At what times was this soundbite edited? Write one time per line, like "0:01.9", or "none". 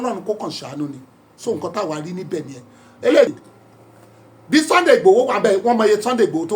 0:03.3

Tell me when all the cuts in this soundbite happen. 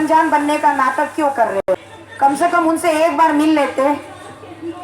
0:01.6

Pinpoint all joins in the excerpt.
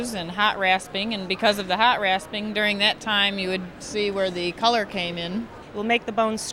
0:05.6

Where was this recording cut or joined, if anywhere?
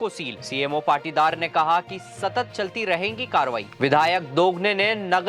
0:03.7

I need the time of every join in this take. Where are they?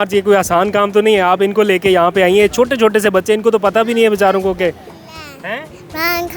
none

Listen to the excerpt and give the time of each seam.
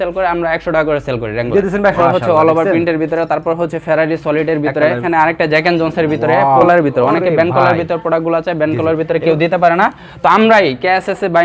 0:02.0
0:05.0
0:06.6

